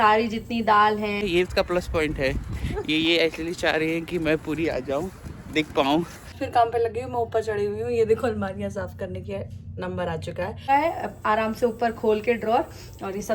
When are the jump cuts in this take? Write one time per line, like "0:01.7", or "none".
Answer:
0:01.2
0:06.4
0:10.7